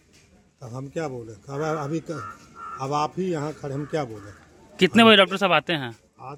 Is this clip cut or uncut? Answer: uncut